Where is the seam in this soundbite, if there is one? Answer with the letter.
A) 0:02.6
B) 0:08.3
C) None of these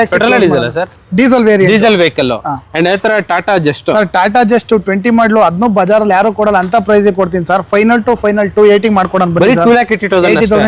C